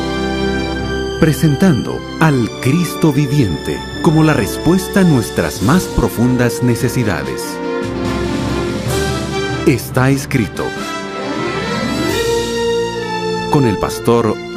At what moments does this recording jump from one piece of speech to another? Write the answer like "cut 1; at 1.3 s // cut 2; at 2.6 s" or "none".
cut 1; at 9.8 s

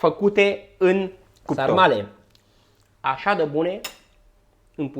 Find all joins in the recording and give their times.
cut 1; at 1.6 s

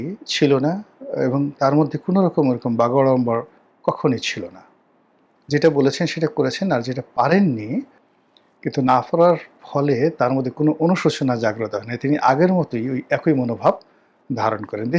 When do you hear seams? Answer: cut 1; at 8.0 s

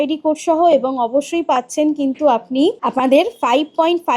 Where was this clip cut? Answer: cut 1; at 2.8 s

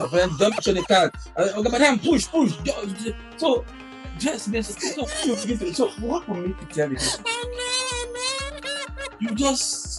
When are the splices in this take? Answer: none

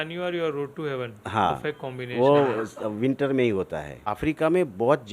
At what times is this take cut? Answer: cut 1; at 4.1 s

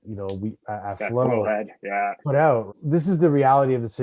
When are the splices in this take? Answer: cut 1; at 2.7 s

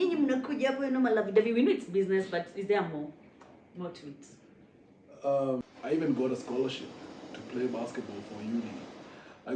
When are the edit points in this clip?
cut 1; at 5.7 s

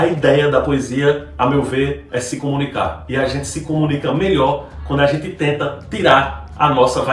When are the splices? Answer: none

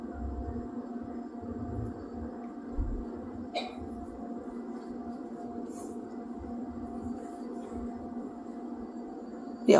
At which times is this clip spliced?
none

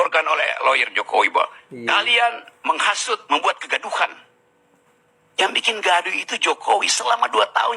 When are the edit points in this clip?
cut 1; at 2.7 s

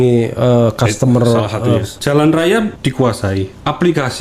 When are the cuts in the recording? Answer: cut 1; at 1.9 s // cut 2; at 3.1 s

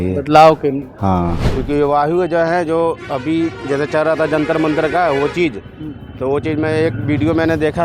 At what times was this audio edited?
cut 1; at 1.5 s

